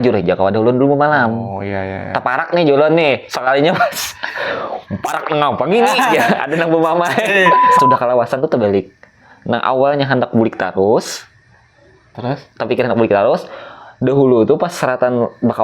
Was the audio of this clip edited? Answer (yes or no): yes